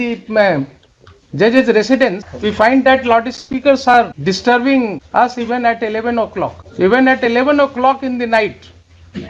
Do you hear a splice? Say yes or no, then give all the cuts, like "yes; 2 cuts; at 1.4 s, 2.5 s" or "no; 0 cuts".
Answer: yes; 4 cuts; at 2.3 s, 4.1 s, 5.0 s, 6.6 s